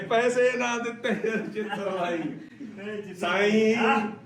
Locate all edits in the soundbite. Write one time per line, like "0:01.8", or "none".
none